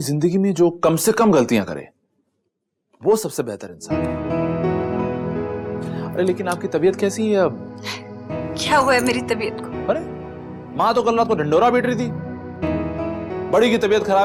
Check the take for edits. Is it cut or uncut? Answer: uncut